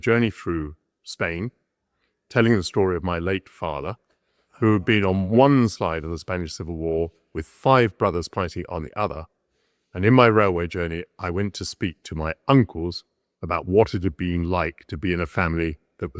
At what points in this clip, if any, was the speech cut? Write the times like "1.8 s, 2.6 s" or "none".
none